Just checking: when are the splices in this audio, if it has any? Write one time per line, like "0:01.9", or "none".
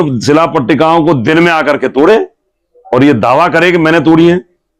none